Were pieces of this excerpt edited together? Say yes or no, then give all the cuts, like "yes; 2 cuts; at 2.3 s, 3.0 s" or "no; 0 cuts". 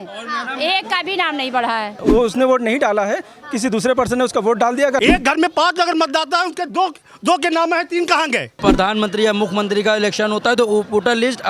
yes; 3 cuts; at 2.0 s, 5.0 s, 8.6 s